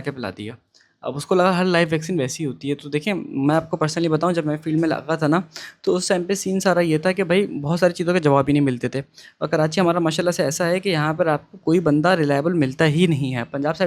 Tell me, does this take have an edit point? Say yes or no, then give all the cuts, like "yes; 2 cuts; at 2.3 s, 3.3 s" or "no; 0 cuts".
no; 0 cuts